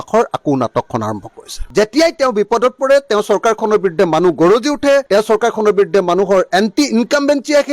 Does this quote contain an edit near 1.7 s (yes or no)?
yes